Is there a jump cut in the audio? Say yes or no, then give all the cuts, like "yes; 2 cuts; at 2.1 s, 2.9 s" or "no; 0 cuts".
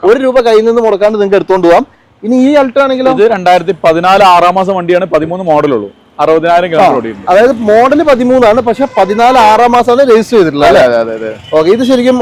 no; 0 cuts